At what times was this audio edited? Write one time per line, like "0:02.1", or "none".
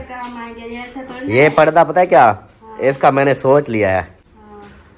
none

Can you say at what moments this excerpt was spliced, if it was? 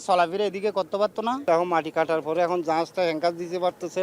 0:01.4

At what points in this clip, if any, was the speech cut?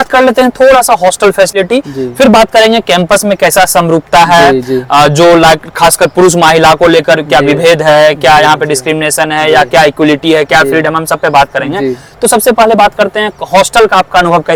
none

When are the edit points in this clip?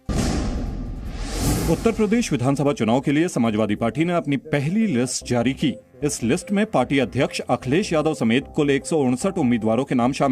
0:01.7

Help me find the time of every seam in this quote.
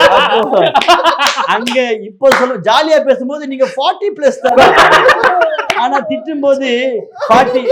none

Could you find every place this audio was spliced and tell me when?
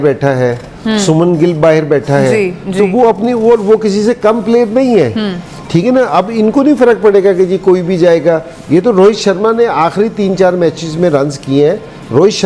none

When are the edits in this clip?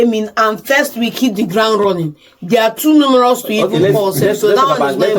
none

